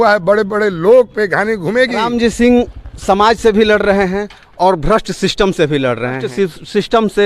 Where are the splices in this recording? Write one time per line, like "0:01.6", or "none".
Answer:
0:02.1
0:06.3